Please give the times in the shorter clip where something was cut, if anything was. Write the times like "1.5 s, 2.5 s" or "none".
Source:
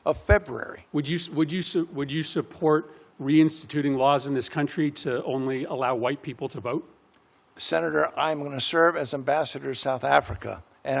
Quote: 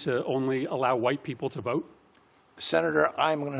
none